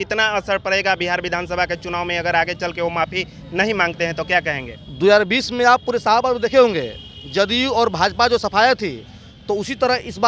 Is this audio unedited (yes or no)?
yes